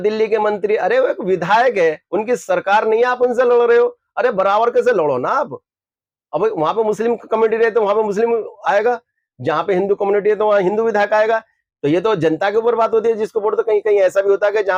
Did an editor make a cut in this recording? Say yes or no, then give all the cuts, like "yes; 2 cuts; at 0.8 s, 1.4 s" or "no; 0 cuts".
no; 0 cuts